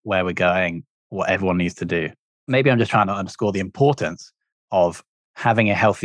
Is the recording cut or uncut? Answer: cut